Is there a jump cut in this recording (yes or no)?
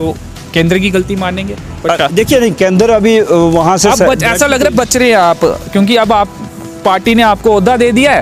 no